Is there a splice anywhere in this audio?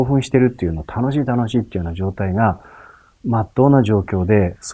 no; 0 cuts

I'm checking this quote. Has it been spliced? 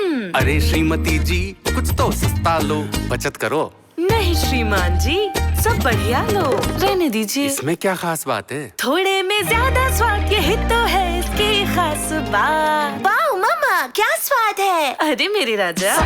no; 0 cuts

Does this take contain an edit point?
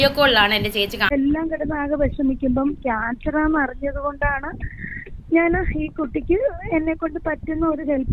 yes; 1 cut; at 1.1 s

